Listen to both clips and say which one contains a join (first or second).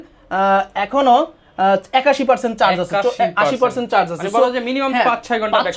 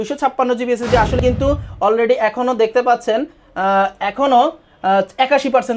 second